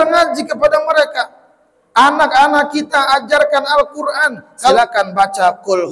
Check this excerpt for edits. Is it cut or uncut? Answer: cut